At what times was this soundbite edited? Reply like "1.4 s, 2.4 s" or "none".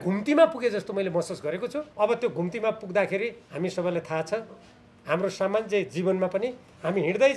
1.8 s, 3.4 s

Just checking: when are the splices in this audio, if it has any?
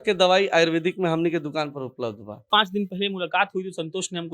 2.5 s

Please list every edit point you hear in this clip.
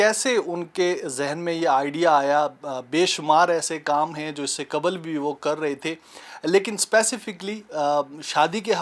none

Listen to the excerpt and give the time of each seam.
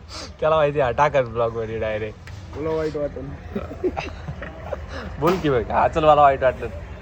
none

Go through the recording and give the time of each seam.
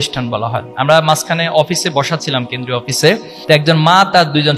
3.3 s

